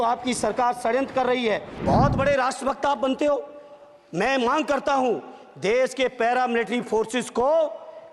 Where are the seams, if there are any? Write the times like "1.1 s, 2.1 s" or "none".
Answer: 1.7 s